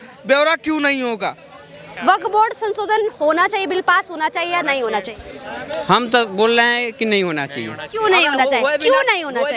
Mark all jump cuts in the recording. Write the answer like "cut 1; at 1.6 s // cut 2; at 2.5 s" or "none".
cut 1; at 2.0 s